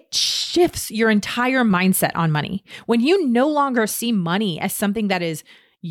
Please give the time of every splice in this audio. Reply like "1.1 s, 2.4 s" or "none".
1.7 s

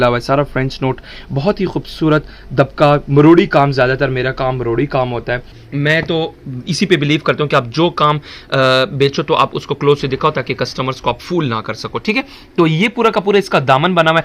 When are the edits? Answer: 5.6 s

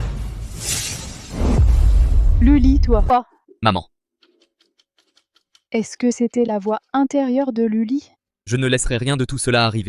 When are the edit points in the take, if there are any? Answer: 3.1 s

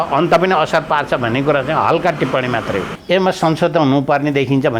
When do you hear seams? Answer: 2.9 s

